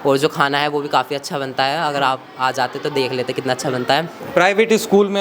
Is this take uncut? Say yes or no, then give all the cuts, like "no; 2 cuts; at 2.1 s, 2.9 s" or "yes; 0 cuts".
yes; 0 cuts